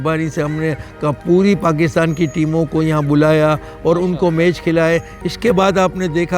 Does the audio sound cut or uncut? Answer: cut